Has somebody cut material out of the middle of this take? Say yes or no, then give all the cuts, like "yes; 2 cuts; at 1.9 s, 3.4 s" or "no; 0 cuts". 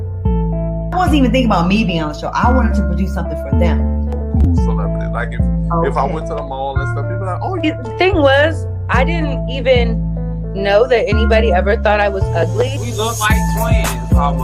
no; 0 cuts